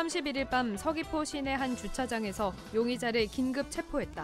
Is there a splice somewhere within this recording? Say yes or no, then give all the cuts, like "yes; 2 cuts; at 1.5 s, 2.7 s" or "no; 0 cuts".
no; 0 cuts